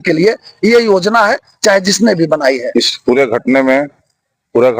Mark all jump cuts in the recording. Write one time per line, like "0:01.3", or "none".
0:02.6